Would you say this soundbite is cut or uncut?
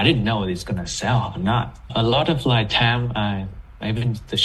uncut